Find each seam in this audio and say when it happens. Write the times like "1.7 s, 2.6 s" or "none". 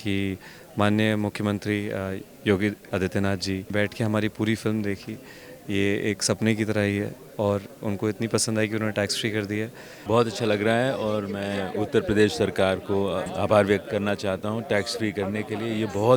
3.7 s, 9.9 s, 13.3 s